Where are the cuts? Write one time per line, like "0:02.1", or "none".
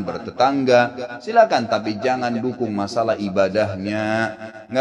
none